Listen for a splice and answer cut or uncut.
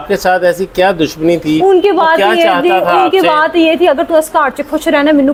uncut